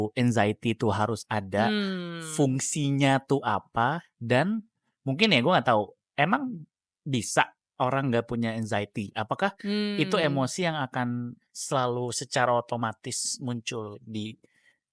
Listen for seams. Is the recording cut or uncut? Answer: uncut